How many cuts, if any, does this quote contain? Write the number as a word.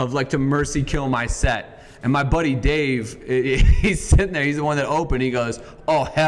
zero